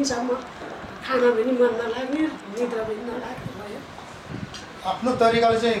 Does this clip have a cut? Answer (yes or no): yes